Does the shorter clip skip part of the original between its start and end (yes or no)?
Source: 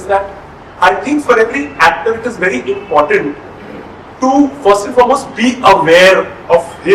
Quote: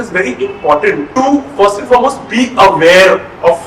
yes